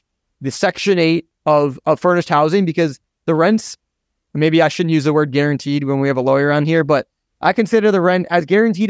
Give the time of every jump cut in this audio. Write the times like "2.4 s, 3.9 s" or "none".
1.3 s